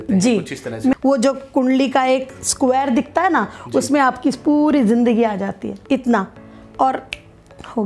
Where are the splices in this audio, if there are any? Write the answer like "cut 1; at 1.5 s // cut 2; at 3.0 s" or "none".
cut 1; at 0.9 s // cut 2; at 5.8 s